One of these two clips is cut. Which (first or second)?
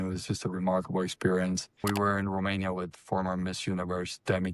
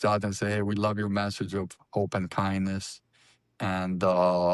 first